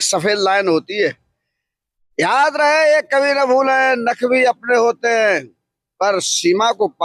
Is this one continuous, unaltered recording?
yes; 0 cuts

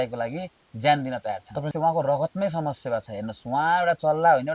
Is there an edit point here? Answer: yes; 1 cut; at 1.7 s

